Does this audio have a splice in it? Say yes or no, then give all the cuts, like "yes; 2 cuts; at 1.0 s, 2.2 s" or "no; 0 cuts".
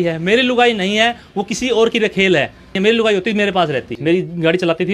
yes; 2 cuts; at 2.7 s, 3.9 s